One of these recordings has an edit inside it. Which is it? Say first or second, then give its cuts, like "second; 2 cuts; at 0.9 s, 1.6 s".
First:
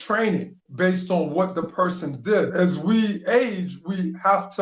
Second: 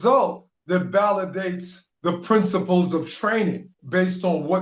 first; 1 cut; at 2.5 s